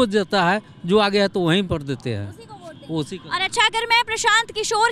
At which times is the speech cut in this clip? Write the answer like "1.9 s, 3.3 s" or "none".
none